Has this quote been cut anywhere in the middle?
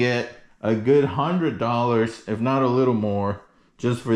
no; 0 cuts

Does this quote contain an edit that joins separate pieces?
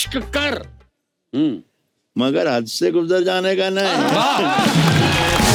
no; 0 cuts

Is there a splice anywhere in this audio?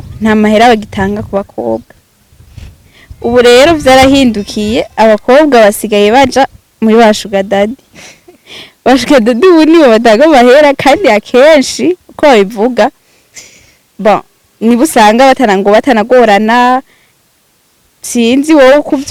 no; 0 cuts

